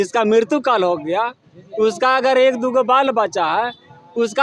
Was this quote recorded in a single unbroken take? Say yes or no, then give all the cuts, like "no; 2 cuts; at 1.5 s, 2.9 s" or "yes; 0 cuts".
yes; 0 cuts